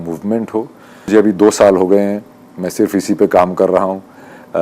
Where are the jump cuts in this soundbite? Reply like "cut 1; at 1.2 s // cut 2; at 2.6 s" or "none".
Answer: cut 1; at 1.1 s